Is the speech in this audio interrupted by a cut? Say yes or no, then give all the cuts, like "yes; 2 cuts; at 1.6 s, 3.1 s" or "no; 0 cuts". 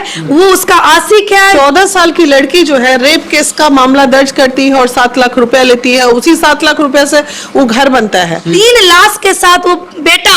yes; 2 cuts; at 1.5 s, 8.5 s